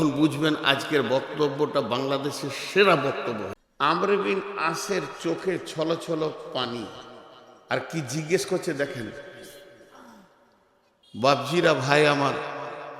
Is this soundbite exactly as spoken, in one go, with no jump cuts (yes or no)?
no